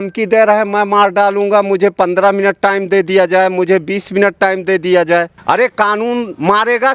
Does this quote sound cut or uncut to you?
uncut